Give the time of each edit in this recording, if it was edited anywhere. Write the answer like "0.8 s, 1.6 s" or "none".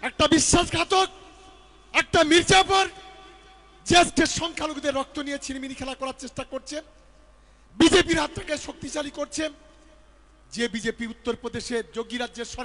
none